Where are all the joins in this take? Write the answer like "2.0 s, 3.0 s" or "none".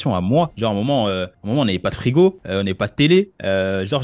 none